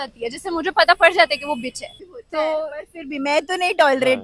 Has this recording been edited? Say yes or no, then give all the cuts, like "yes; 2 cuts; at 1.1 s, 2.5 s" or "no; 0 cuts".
no; 0 cuts